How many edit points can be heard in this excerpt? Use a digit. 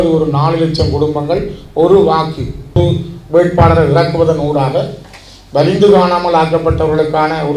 1